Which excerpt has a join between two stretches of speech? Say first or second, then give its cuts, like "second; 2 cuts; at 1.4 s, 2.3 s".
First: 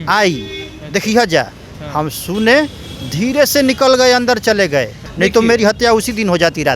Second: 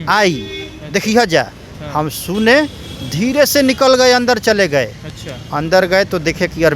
first; 1 cut; at 5.0 s